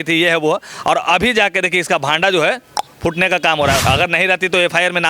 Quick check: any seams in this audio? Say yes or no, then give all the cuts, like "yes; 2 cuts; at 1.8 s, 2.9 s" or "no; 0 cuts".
yes; 1 cut; at 3.8 s